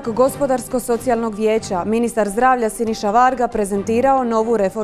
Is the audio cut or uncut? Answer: uncut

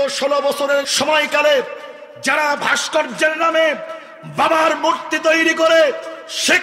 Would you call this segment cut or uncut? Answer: cut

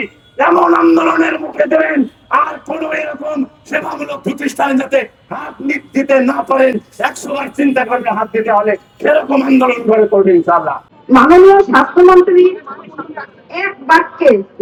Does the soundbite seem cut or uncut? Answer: uncut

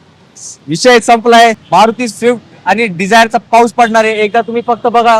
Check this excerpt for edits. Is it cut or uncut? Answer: cut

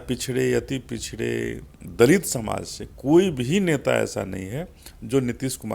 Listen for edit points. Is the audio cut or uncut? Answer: uncut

